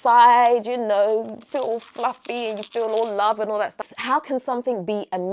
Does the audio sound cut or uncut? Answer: cut